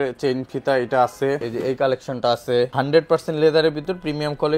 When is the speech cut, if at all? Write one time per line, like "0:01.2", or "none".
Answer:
0:01.5
0:02.7

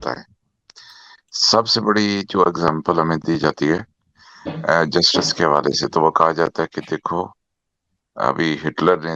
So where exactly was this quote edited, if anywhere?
none

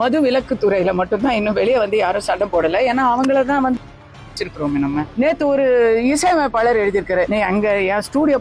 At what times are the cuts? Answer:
0:05.1
0:07.3

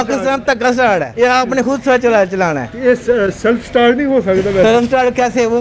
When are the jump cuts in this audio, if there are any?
0:01.1

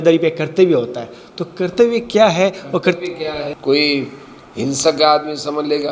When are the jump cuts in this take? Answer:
0:03.5

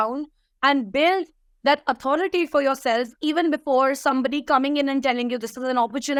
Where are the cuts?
none

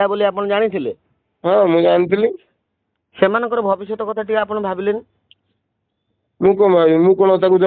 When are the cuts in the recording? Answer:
none

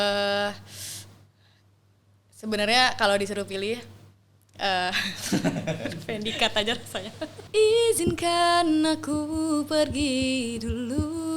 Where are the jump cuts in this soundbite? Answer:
0:07.4

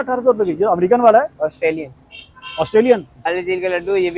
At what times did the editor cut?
0:03.3

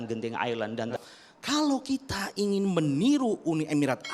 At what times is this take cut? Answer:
0:01.0

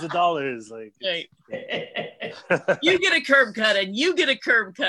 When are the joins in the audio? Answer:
none

